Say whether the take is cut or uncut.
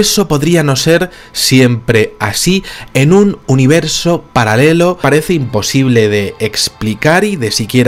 uncut